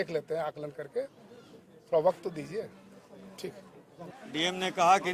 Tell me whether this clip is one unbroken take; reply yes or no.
no